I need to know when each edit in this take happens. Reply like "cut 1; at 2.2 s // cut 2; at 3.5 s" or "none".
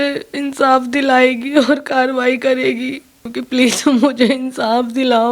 cut 1; at 3.2 s